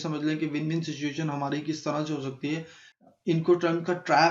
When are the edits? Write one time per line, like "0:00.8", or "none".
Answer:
0:02.8